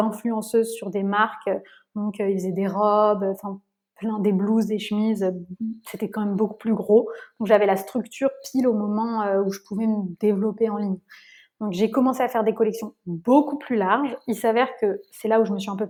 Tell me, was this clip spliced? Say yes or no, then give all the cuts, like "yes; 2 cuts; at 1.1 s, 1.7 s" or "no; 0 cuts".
no; 0 cuts